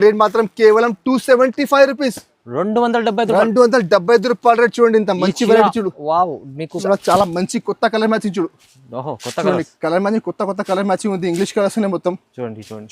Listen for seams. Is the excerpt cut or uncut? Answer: cut